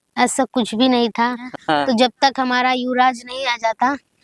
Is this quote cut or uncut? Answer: cut